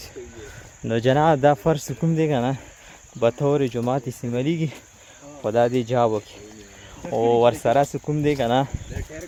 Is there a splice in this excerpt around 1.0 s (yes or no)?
no